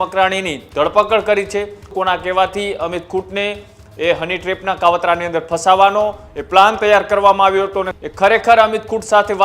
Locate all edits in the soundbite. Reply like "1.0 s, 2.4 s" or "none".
1.9 s, 7.9 s

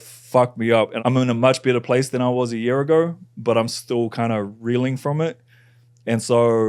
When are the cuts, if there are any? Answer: 0.9 s

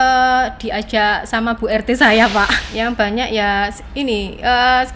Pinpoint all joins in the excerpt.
2.6 s

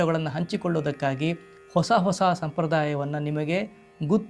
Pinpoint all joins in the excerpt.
none

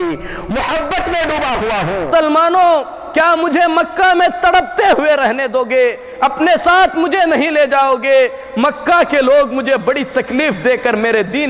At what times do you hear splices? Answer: 2.1 s

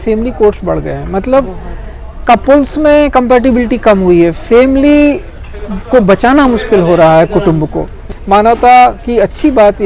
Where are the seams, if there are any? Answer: 8.1 s

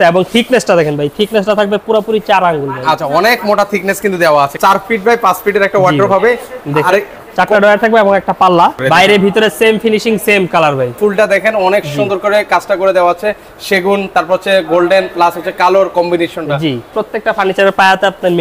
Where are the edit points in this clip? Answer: 4.5 s, 8.8 s, 11.0 s, 17.0 s

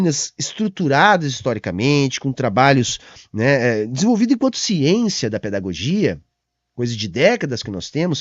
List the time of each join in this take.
none

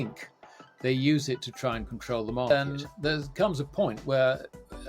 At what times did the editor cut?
2.5 s

